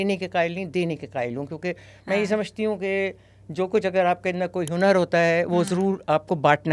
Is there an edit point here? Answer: no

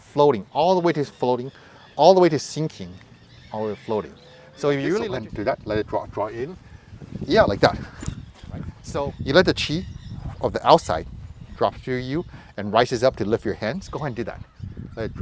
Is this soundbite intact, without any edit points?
no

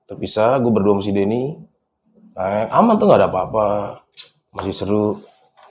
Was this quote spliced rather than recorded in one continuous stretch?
no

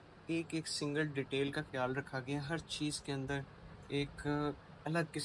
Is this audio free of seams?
yes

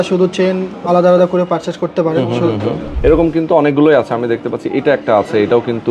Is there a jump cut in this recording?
yes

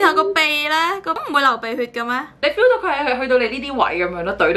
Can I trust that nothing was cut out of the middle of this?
no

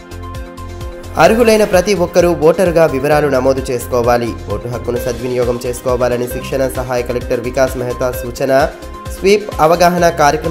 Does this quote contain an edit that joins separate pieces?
yes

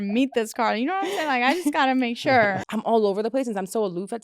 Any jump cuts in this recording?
yes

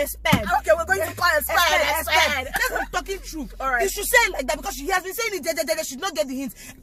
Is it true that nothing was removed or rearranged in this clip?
yes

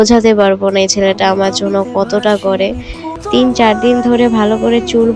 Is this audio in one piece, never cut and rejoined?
no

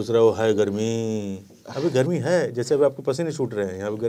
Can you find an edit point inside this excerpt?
no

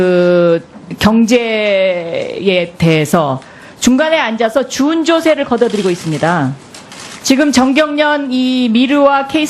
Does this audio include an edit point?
yes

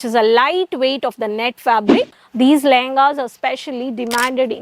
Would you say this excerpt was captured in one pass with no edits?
no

